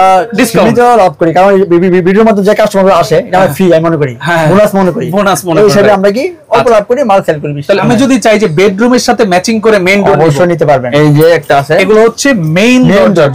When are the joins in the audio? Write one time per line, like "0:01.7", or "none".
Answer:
0:07.8
0:10.9